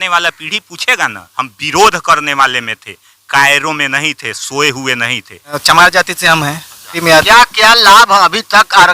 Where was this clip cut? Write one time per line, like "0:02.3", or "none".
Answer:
0:01.2
0:05.5
0:06.7